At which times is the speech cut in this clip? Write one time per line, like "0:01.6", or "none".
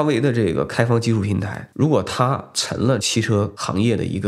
0:03.0